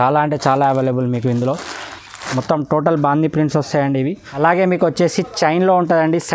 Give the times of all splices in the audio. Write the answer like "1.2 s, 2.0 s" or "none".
4.2 s